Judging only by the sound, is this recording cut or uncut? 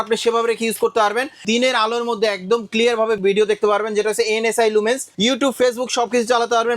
cut